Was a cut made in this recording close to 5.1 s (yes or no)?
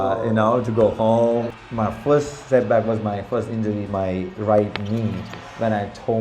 no